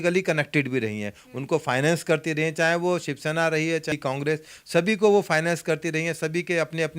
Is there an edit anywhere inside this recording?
yes; 1 cut; at 3.9 s

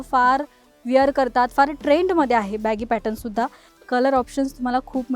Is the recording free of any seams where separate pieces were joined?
no; 1 cut; at 3.7 s

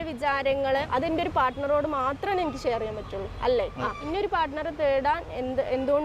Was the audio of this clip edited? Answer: yes; 2 cuts; at 1.1 s, 3.9 s

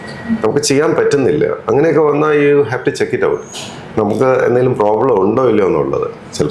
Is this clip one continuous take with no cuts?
yes; 0 cuts

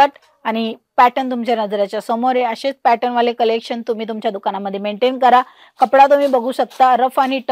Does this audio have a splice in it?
no; 0 cuts

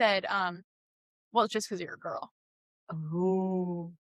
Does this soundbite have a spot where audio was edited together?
no; 0 cuts

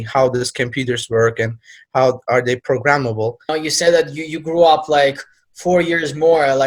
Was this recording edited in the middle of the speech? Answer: yes; 1 cut; at 3.4 s

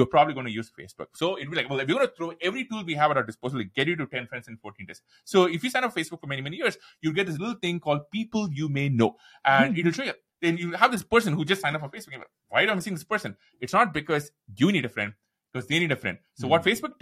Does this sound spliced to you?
no; 0 cuts

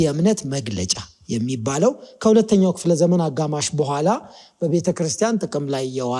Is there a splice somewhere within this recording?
no; 0 cuts

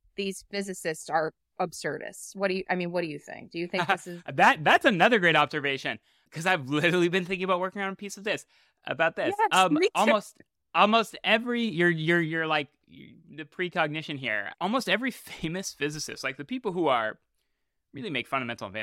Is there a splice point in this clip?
no; 0 cuts

